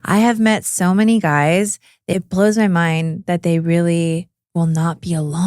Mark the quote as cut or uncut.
cut